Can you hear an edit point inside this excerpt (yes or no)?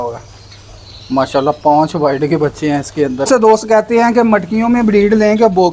yes